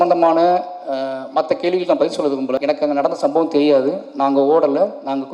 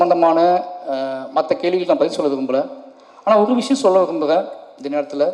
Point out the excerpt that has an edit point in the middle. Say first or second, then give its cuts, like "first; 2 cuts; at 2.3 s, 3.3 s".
first; 1 cut; at 2.6 s